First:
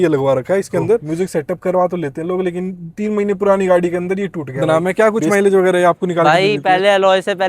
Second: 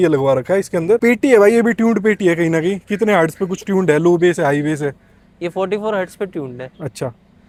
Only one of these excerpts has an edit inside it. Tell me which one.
first; 2 cuts; at 1.0 s, 4.6 s

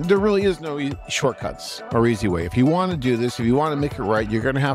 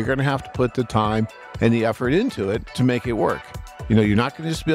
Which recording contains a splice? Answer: second; 2 cuts; at 2.7 s, 3.8 s

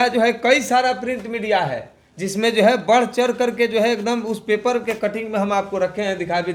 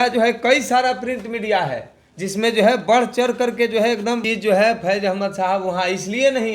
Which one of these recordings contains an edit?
second; 1 cut; at 4.2 s

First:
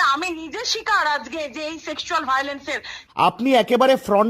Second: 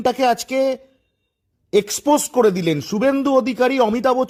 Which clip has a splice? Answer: first; 1 cut; at 2.9 s

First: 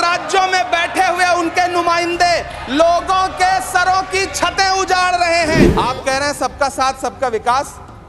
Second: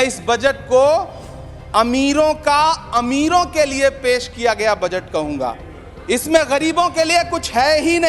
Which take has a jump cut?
first; 1 cut; at 5.7 s

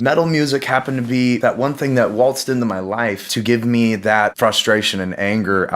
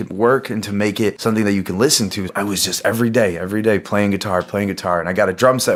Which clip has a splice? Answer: first; 3 cuts; at 1.4 s, 3.3 s, 4.3 s

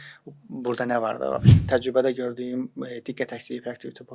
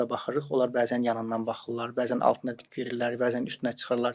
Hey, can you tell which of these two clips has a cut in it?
first; 1 cut; at 1.6 s

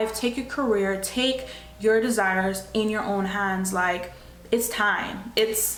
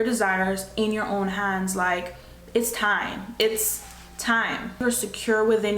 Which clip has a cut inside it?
second; 1 cut; at 4.8 s

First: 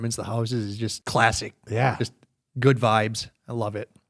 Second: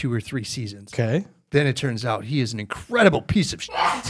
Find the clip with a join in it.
first; 1 cut; at 1.0 s

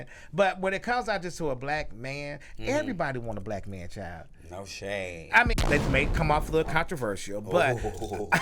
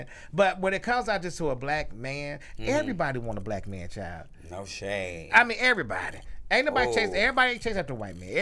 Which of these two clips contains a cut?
first; 1 cut; at 5.6 s

